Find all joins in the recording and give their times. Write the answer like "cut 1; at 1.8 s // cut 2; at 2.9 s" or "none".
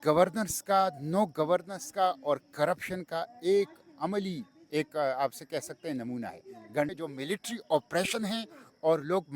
cut 1; at 6.9 s